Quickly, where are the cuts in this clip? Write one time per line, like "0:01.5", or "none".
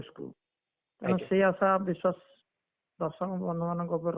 none

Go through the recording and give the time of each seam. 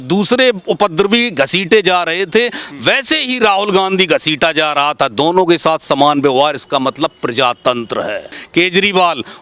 0:08.4

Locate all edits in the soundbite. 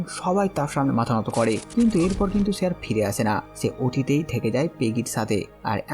0:01.6

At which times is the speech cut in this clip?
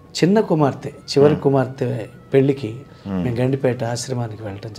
none

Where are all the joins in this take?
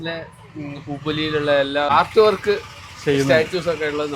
0:01.9

